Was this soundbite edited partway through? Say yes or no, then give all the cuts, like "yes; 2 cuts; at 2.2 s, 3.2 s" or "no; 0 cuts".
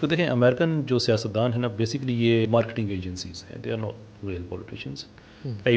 yes; 1 cut; at 2.5 s